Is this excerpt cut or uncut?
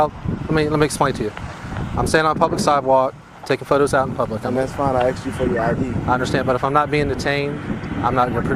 uncut